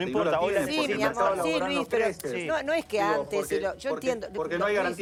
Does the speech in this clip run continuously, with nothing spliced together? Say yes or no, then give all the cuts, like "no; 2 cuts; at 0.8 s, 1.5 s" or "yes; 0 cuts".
yes; 0 cuts